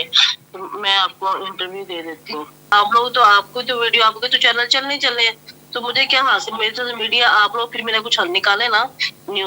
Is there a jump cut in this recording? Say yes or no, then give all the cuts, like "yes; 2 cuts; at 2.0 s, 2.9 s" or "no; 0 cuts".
yes; 1 cut; at 2.7 s